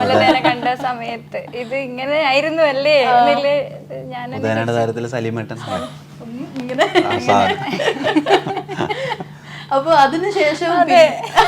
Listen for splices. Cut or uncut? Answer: uncut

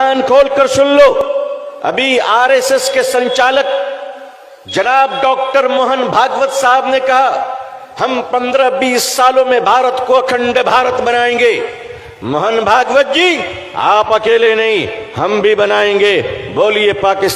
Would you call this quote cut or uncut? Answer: cut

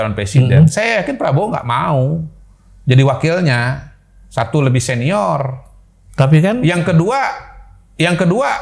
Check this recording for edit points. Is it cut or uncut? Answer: uncut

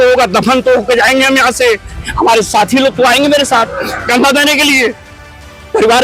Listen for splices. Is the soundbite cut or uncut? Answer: uncut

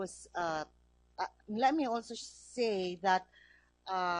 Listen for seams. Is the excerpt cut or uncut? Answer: cut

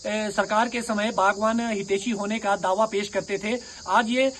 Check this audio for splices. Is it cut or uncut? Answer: uncut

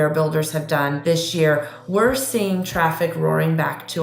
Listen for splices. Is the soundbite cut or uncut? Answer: cut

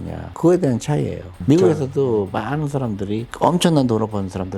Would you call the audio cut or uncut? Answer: cut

